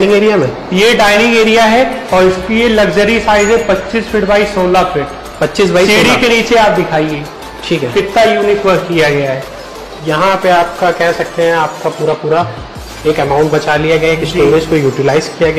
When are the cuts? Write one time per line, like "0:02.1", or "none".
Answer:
none